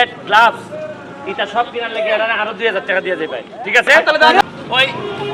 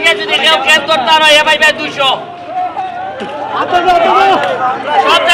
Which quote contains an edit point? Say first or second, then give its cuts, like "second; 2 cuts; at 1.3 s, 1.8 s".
first; 1 cut; at 4.4 s